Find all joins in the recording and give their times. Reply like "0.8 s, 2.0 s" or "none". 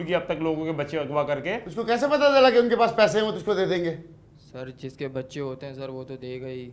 1.7 s

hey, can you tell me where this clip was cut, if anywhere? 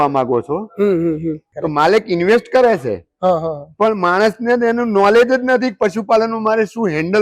1.5 s

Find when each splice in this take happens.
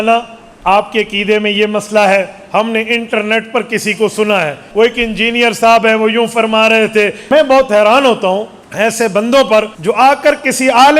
4.6 s, 7.2 s, 8.6 s, 9.7 s

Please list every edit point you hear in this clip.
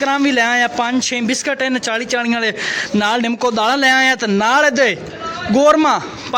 none

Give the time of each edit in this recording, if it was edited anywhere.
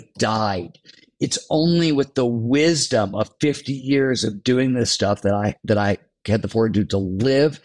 none

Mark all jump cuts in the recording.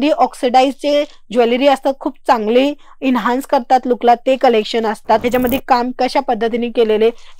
5.2 s

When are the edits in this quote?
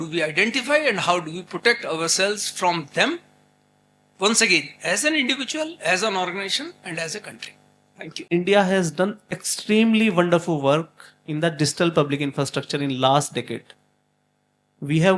8.2 s

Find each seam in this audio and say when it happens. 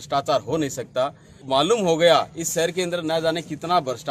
1.4 s

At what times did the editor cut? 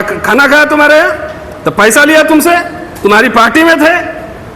none

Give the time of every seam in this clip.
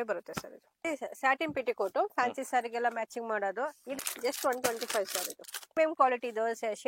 0.8 s, 4.0 s, 5.8 s

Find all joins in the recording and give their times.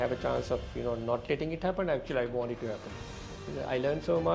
none

